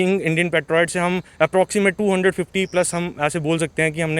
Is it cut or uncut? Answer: uncut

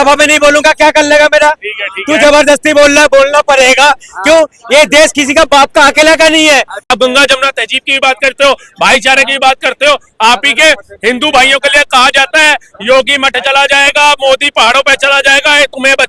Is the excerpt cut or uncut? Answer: cut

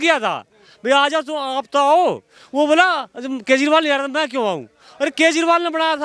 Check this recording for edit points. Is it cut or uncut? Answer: uncut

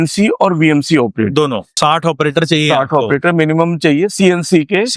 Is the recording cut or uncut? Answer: cut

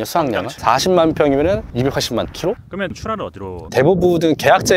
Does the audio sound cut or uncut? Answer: uncut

